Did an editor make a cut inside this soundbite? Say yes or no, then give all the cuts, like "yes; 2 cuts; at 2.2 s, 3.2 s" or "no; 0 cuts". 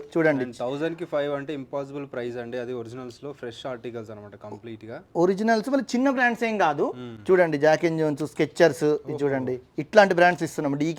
no; 0 cuts